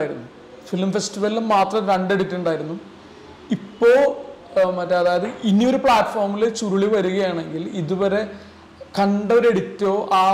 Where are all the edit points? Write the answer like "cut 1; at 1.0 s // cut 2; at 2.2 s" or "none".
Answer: none